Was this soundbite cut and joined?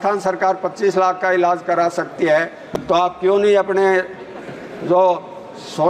no; 0 cuts

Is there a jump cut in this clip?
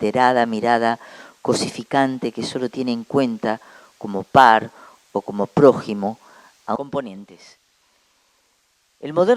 no; 0 cuts

